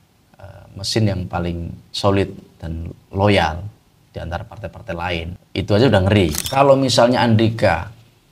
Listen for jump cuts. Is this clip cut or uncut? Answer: cut